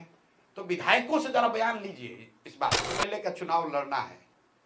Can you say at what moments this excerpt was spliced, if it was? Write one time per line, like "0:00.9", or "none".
0:03.0